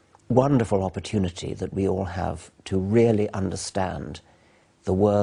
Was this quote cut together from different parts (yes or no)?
no